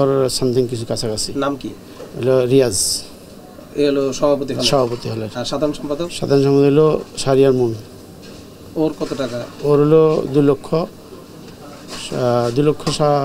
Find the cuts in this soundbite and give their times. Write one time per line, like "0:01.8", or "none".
none